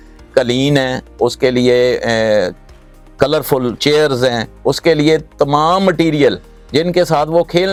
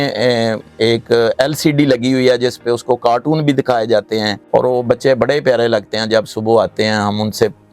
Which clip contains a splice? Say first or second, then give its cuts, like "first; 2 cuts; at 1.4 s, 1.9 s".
second; 1 cut; at 4.4 s